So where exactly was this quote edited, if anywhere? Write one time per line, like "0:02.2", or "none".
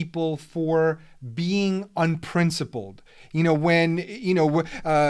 none